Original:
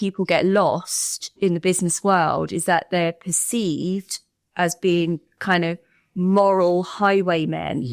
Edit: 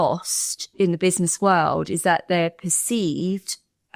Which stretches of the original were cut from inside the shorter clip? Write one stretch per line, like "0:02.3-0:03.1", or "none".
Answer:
none